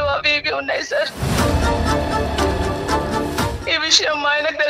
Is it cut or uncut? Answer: cut